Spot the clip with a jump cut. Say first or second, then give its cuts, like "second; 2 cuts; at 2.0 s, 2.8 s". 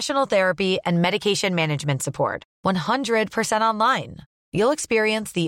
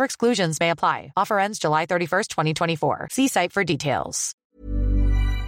second; 1 cut; at 4.5 s